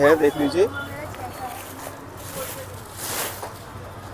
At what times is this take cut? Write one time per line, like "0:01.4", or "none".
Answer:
none